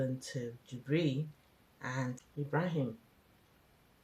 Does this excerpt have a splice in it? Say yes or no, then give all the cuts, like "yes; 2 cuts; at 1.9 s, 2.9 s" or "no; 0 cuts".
yes; 1 cut; at 2.2 s